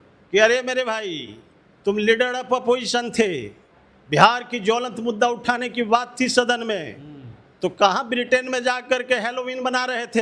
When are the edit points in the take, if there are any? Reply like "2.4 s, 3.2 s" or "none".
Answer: none